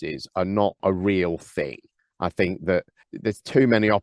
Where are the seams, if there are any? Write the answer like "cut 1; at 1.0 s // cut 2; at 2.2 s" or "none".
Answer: cut 1; at 0.8 s // cut 2; at 3.0 s

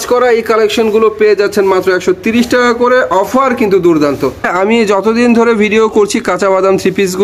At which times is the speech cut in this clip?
cut 1; at 4.5 s

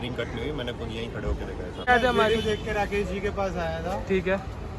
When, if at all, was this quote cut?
cut 1; at 1.9 s

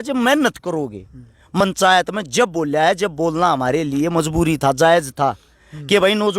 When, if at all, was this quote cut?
cut 1; at 1.6 s

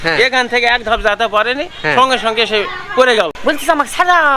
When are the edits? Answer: cut 1; at 3.3 s

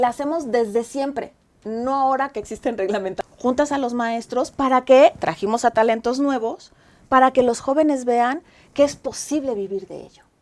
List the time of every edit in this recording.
cut 1; at 3.1 s

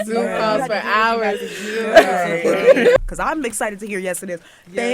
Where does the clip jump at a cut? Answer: cut 1; at 3.0 s

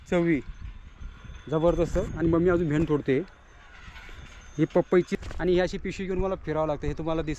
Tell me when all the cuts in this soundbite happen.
cut 1; at 5.1 s

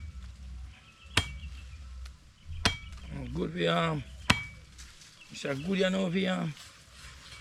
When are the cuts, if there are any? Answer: none

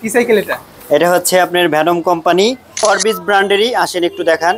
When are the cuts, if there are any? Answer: cut 1; at 2.8 s

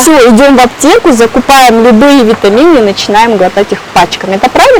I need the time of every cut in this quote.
none

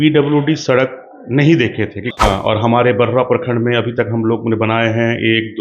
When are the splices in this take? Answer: cut 1; at 2.1 s

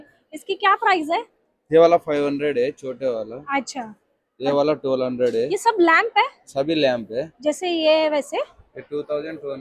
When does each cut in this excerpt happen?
none

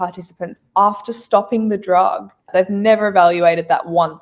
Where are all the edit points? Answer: cut 1; at 2.5 s

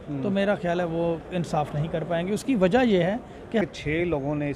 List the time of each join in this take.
cut 1; at 3.6 s

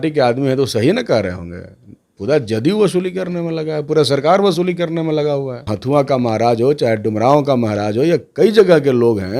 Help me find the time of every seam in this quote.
cut 1; at 5.7 s

